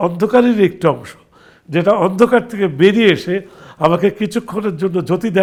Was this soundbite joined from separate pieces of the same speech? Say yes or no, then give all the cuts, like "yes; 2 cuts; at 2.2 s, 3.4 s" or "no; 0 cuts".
no; 0 cuts